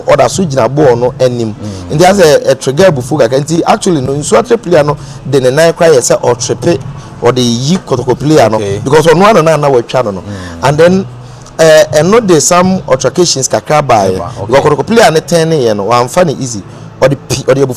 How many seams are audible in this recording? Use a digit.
0